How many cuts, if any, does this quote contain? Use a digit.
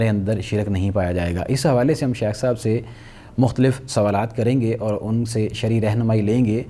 0